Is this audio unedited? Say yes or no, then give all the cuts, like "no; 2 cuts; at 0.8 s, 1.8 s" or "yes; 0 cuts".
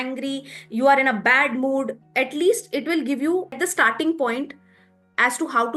no; 1 cut; at 3.6 s